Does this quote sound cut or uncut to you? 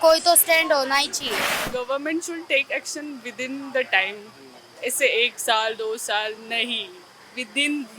cut